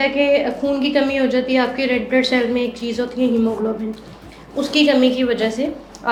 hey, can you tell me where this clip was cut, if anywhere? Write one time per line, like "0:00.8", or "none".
none